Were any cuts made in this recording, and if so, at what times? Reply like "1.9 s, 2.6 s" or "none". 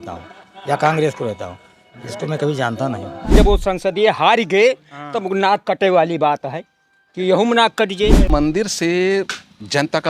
3.3 s, 8.3 s

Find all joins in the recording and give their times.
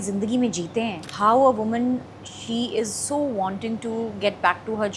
1.0 s

